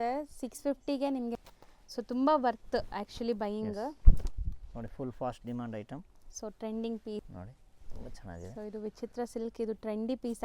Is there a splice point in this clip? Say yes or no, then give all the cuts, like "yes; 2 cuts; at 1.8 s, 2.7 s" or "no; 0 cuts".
yes; 2 cuts; at 1.4 s, 7.3 s